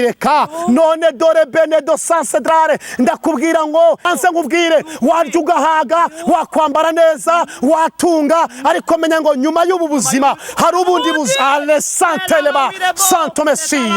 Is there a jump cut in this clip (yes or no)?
yes